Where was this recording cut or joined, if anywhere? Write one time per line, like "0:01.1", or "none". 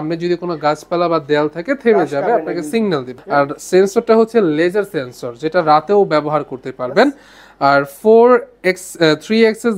none